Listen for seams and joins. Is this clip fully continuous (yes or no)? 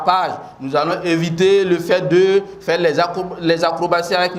yes